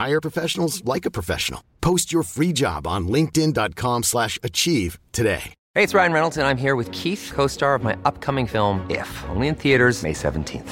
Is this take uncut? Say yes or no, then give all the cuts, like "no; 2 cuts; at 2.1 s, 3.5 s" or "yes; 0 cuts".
no; 1 cut; at 5.5 s